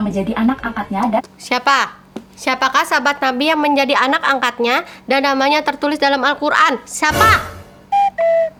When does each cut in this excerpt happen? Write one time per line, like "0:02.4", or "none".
none